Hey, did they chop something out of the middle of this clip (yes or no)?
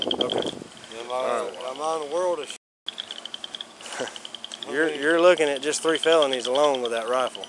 yes